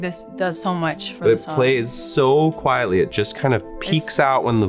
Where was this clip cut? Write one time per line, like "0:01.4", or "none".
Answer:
none